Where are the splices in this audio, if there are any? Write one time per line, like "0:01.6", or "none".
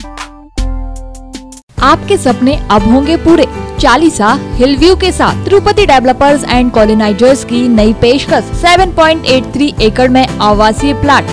none